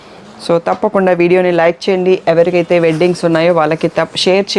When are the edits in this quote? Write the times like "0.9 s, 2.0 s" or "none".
none